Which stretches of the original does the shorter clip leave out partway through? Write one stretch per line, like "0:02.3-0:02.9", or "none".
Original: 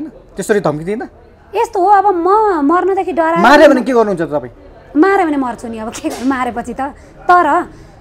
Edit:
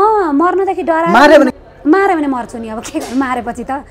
0:03.8-0:04.6